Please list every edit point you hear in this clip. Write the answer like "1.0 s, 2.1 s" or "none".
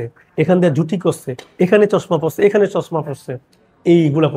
none